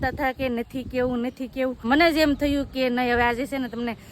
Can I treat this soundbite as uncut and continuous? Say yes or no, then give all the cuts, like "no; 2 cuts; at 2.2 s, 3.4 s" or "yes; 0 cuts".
no; 1 cut; at 1.8 s